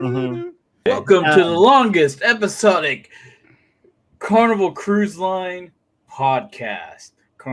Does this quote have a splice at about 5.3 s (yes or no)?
no